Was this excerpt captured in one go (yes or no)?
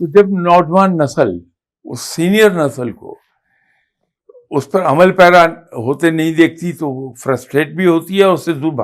yes